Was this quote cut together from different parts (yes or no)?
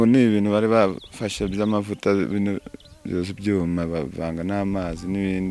no